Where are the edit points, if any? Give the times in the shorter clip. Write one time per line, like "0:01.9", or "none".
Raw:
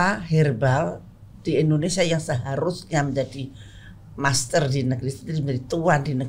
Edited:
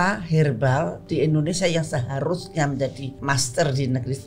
0:01.0
0:03.1